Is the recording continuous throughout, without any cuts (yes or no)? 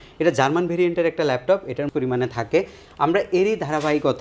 no